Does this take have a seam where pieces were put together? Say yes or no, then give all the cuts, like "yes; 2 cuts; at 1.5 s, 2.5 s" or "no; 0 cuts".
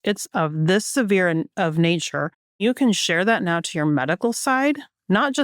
yes; 1 cut; at 2.6 s